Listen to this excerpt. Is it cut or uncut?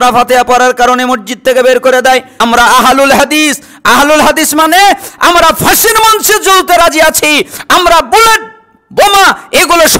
cut